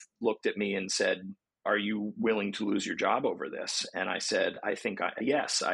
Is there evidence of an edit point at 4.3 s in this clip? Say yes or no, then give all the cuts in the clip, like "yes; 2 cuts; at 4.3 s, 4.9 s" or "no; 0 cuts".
no; 1 cut; at 1.3 s